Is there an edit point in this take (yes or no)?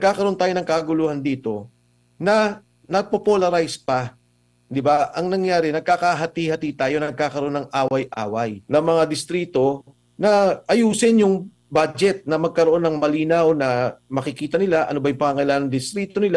yes